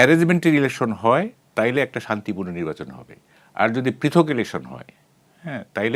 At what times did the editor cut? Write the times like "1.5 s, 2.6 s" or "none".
none